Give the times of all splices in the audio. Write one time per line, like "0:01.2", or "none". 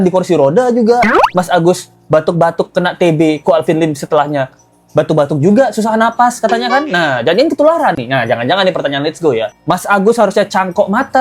none